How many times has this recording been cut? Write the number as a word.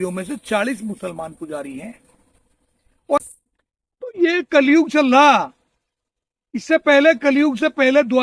one